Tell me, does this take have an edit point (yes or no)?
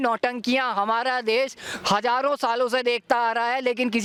no